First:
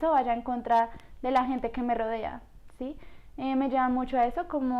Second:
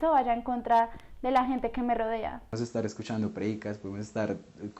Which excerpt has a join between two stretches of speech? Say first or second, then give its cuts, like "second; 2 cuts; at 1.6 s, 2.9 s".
second; 1 cut; at 2.5 s